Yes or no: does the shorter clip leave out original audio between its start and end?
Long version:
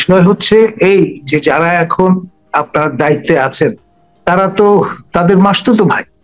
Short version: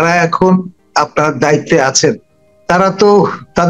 no